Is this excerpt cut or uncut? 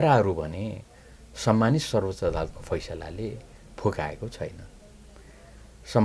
uncut